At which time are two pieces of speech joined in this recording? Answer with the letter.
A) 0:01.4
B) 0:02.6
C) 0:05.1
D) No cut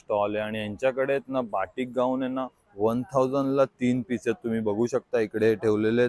D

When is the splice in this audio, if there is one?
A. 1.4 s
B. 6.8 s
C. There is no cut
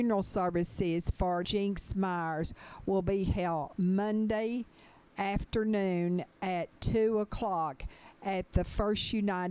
A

